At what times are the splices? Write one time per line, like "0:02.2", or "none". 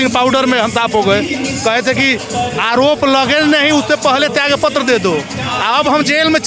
none

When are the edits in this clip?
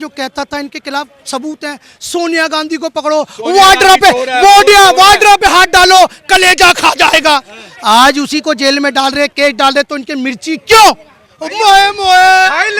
none

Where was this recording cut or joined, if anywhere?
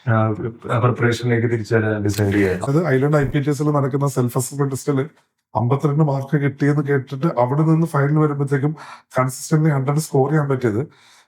0:02.7

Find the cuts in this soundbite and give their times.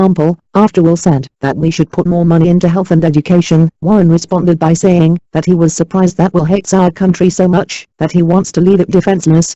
0:06.8

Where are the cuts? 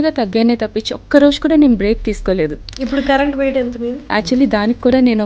0:02.7
0:04.0

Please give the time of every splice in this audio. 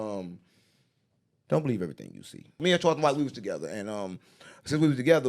0:02.6

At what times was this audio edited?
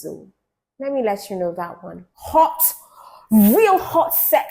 0:02.1

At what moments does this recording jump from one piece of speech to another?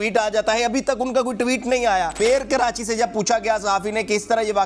0:02.1

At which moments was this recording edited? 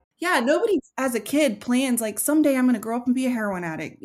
0:00.9

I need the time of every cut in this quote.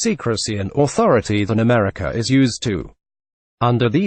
none

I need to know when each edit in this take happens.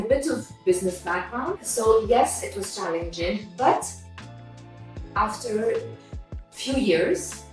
0:01.6

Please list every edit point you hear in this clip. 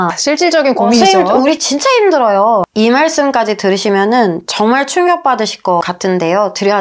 0:02.7
0:05.8

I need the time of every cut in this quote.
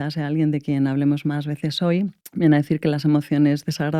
0:02.2

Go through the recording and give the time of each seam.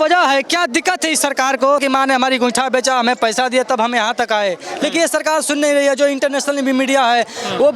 0:01.8

